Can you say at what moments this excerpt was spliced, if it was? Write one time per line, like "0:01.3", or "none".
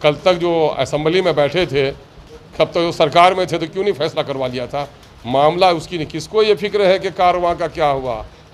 none